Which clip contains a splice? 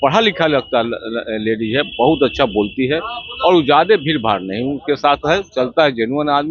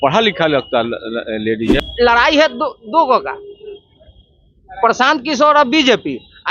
second; 1 cut; at 1.9 s

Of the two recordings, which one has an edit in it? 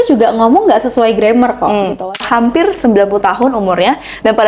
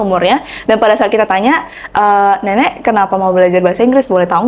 first; 1 cut; at 2.2 s

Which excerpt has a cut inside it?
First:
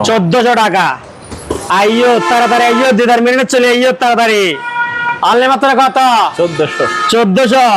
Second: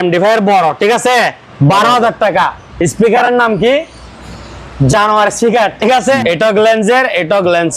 second; 2 cuts; at 1.4 s, 6.2 s

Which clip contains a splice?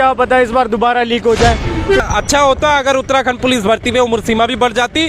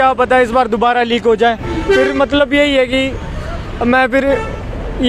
first; 1 cut; at 2.0 s

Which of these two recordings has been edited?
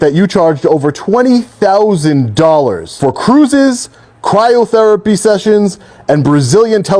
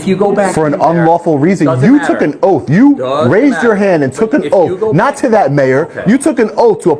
first; 1 cut; at 2.9 s

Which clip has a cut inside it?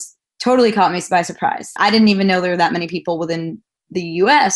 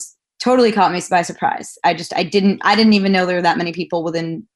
first; 1 cut; at 1.7 s

